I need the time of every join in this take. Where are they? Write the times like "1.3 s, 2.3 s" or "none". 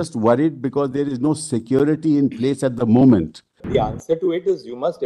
3.6 s